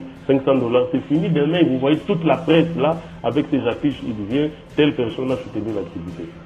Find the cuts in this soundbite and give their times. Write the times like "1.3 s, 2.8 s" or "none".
none